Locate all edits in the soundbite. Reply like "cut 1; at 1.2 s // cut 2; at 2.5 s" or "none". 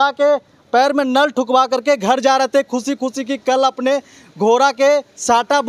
none